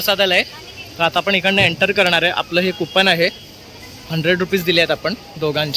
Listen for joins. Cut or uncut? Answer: uncut